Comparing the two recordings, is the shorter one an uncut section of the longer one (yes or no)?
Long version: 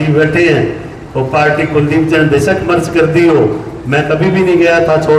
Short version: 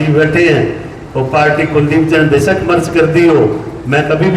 yes